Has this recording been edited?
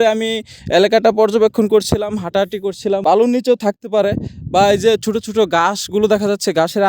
yes; 1 cut; at 3.0 s

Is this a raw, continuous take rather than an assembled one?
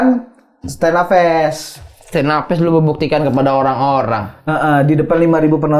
yes; 0 cuts

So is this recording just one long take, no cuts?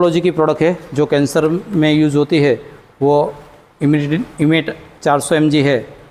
yes; 0 cuts

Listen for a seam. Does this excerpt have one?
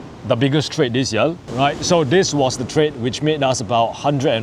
yes; 1 cut; at 1.4 s

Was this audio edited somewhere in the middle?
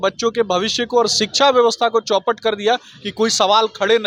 no; 0 cuts

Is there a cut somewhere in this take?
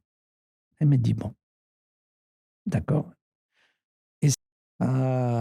yes; 1 cut; at 4.4 s

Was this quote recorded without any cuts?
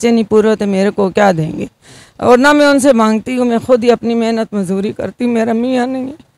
yes; 0 cuts

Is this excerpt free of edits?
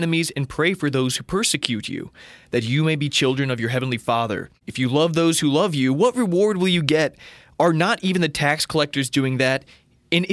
no; 1 cut; at 4.6 s

